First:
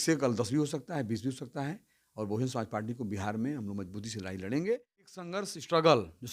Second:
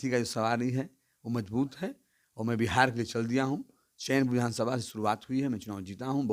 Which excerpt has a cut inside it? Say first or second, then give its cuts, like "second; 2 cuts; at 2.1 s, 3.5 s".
first; 1 cut; at 5.4 s